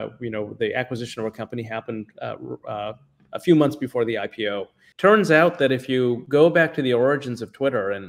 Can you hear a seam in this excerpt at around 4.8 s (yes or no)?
yes